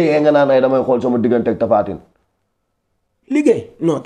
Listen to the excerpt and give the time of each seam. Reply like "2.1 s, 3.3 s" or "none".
none